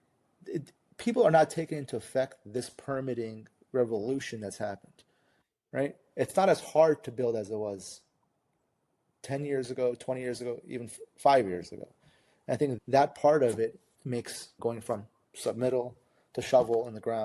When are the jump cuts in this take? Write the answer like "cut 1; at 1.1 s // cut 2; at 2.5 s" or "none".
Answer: cut 1; at 12.8 s

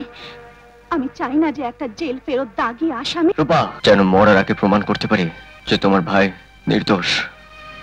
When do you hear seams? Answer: cut 1; at 3.7 s // cut 2; at 5.5 s // cut 3; at 6.5 s

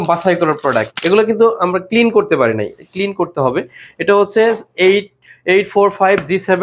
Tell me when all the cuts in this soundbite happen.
cut 1; at 0.9 s

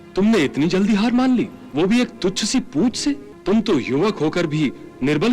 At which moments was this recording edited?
cut 1; at 1.6 s // cut 2; at 3.3 s

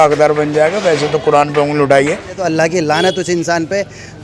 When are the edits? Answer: cut 1; at 2.4 s

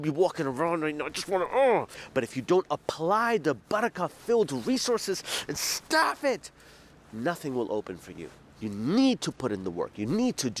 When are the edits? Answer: cut 1; at 2.0 s

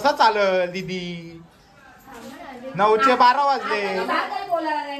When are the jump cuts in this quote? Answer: none

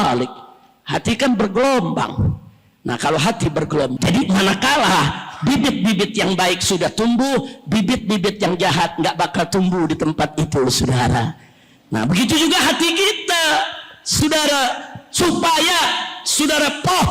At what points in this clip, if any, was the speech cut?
cut 1; at 3.9 s

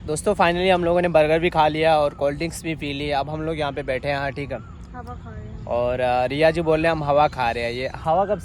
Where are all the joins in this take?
none

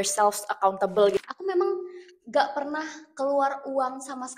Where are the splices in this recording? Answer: cut 1; at 1.2 s

